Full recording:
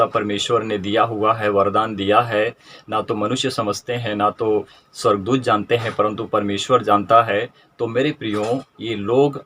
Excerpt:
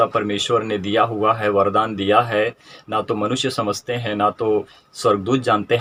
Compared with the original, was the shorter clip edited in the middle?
no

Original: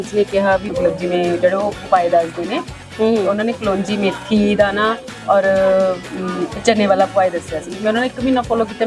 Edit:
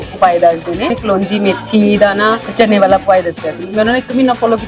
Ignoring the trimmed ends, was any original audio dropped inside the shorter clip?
yes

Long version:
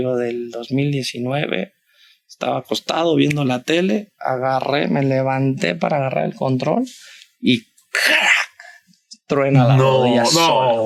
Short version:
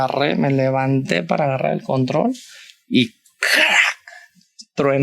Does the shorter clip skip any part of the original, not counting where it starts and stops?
no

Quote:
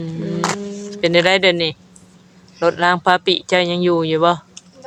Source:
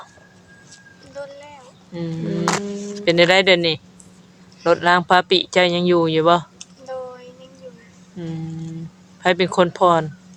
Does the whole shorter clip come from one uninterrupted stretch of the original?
yes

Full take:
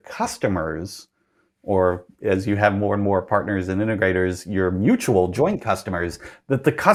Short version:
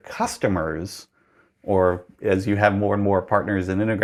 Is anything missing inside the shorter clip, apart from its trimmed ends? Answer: no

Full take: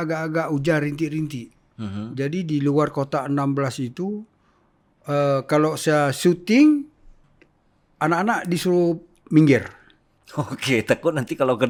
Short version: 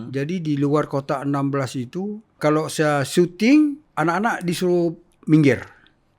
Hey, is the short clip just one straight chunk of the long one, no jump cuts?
no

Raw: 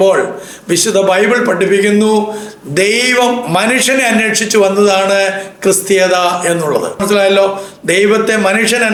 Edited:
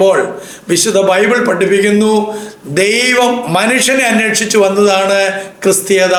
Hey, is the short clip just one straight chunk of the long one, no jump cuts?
yes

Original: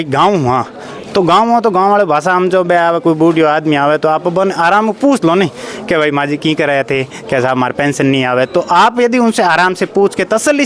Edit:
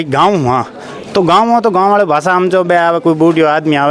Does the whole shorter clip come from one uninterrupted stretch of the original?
yes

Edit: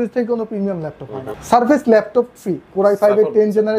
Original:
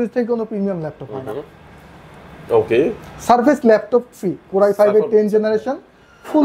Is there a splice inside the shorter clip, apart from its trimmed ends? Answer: yes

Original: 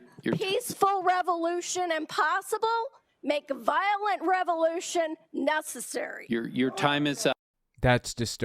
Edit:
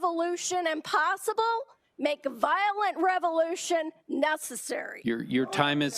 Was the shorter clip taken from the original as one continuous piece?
yes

